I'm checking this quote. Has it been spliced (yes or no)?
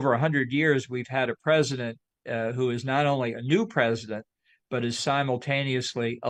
no